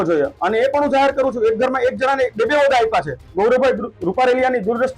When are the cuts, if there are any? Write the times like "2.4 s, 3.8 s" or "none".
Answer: 3.3 s